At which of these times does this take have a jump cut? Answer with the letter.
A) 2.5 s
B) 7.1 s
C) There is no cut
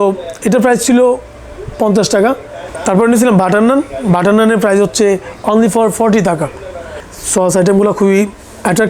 B